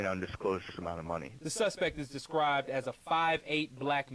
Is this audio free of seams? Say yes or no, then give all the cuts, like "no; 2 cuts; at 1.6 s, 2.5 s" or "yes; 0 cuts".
no; 1 cut; at 1.4 s